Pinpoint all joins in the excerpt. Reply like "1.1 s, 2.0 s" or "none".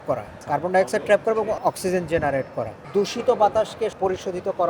none